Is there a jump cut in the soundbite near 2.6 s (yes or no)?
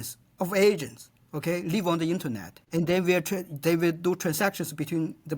yes